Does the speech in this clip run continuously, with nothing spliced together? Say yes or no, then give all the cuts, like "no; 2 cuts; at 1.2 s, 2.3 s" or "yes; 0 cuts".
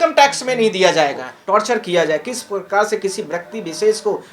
no; 1 cut; at 1.3 s